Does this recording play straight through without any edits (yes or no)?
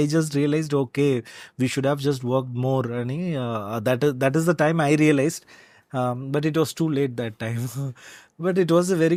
yes